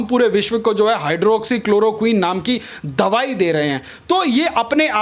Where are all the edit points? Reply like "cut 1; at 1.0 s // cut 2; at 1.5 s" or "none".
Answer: none